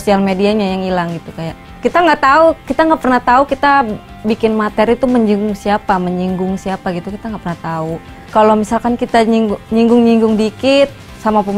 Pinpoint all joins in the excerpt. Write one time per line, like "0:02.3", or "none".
0:01.7
0:08.2